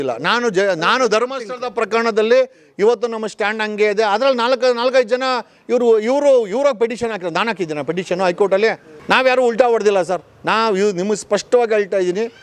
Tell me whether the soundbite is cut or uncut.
cut